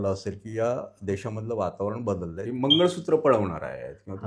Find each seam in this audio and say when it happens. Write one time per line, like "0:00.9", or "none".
0:02.4